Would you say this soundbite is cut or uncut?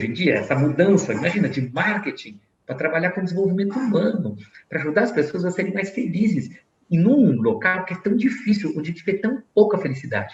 uncut